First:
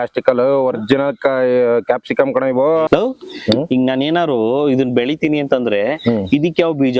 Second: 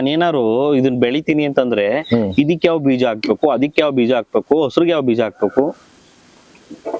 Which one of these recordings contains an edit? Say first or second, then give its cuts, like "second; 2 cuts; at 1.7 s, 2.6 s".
first; 1 cut; at 2.9 s